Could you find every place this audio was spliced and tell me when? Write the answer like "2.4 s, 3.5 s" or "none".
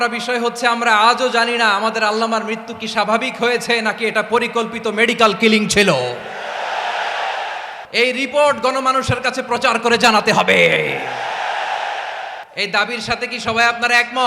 7.7 s, 12.4 s